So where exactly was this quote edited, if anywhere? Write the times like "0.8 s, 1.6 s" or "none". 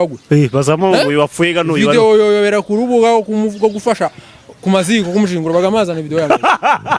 none